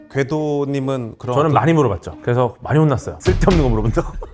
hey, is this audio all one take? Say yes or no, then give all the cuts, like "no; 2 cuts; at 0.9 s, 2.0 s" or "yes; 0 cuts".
yes; 0 cuts